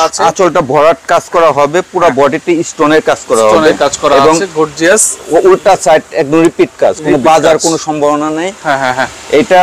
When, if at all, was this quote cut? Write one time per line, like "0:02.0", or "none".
none